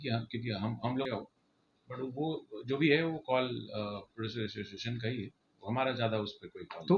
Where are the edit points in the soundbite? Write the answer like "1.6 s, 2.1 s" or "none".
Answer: 1.0 s